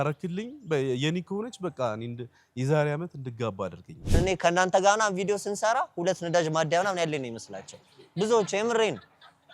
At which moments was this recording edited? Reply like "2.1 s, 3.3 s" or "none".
4.1 s